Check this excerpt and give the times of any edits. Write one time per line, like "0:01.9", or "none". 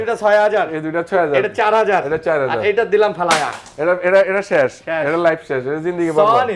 none